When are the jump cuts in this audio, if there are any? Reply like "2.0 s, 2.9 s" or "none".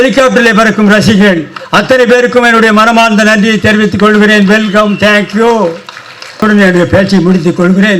6.4 s

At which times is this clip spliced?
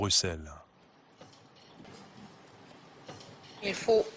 1.8 s

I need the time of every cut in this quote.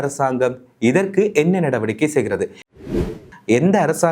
2.7 s

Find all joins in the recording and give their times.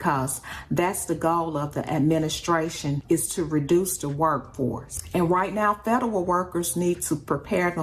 4.9 s

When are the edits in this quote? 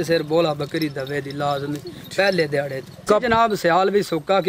3.0 s

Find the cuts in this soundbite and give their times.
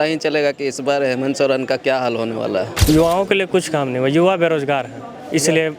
2.8 s

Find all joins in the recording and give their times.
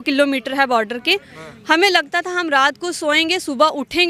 none

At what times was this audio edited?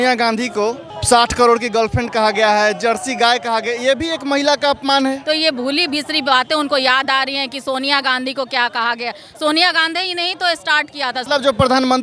0.9 s, 5.2 s, 11.2 s

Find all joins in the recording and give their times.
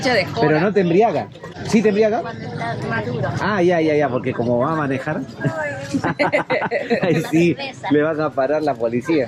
1.5 s

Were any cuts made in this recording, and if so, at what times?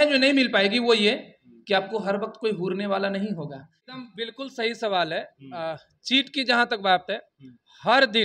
3.9 s

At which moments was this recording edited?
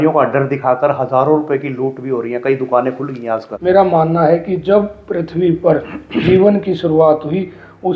3.5 s

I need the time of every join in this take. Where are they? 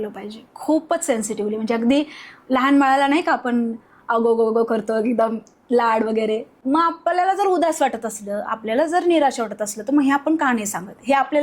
6.5 s

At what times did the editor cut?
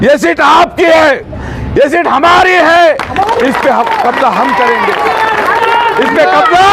none

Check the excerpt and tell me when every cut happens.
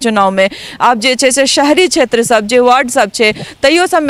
none

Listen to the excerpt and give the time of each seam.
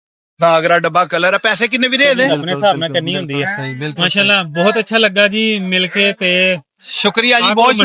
2.3 s

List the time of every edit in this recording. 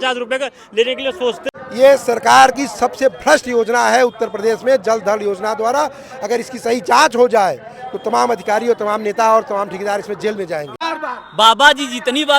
1.4 s, 10.8 s

